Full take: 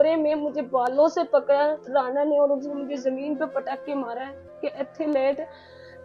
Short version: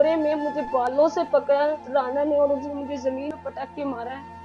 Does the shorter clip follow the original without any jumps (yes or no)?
no